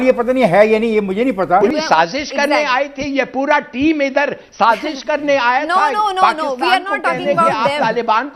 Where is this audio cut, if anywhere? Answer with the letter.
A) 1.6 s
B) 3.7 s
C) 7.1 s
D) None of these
A